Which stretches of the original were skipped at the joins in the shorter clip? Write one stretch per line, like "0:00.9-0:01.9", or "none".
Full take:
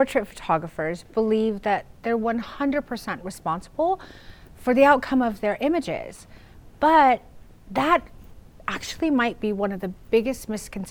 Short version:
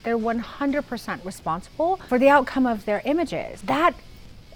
0:04.0-0:04.6
0:06.0-0:07.6